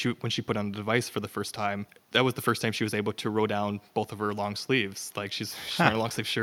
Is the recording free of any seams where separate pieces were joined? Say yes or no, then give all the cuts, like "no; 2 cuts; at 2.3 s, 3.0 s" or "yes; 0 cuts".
no; 1 cut; at 2.0 s